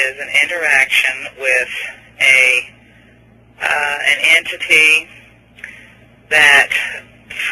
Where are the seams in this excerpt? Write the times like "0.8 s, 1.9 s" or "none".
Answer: 2.9 s